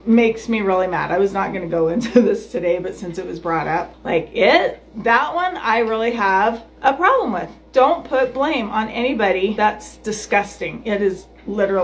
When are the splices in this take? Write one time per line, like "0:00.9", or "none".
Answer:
0:03.9
0:06.7
0:09.5